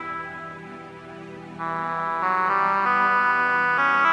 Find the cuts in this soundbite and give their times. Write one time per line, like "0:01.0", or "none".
none